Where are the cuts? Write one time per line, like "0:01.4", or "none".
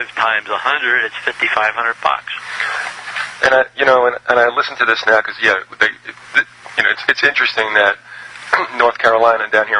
none